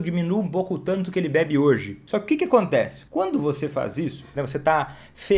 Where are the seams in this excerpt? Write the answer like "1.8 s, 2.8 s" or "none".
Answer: 1.9 s, 3.0 s, 4.4 s